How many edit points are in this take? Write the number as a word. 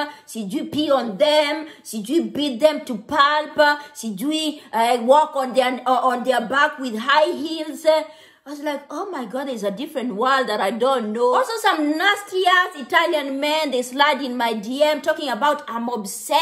one